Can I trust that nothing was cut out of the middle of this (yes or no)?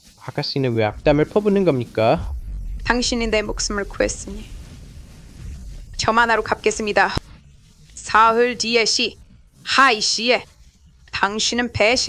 yes